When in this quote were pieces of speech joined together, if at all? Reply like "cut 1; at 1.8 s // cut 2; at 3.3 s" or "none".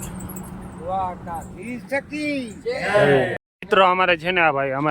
cut 1; at 3.4 s